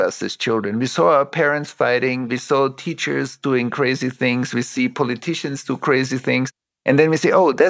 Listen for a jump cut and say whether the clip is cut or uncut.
cut